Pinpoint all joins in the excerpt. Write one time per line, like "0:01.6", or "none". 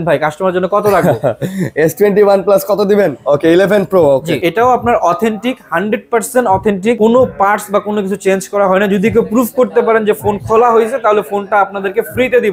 0:03.2
0:04.3
0:07.0